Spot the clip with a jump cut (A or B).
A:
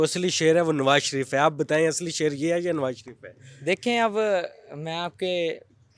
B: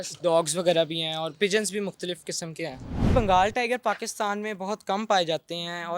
B